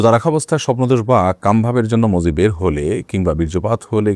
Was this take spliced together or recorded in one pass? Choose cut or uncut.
uncut